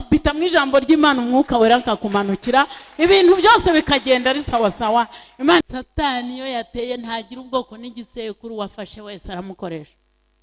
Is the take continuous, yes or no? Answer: no